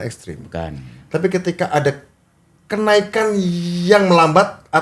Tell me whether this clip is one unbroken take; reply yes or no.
yes